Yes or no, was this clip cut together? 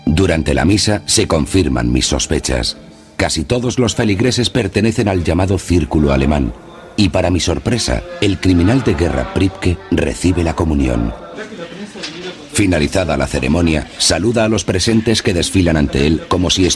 no